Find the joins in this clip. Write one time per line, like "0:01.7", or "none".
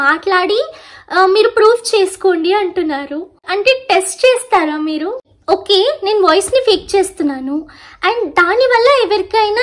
0:03.5
0:05.3